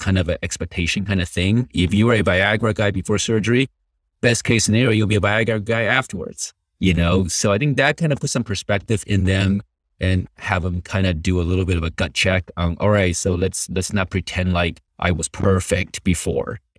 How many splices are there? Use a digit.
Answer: 1